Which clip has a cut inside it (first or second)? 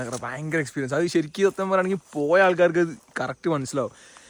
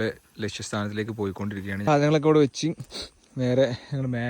second